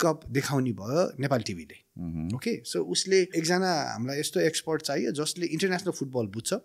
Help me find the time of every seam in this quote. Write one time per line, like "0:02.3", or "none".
0:03.3